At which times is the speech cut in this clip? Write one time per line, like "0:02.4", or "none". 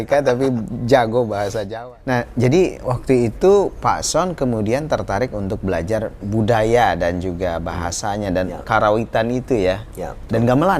0:01.7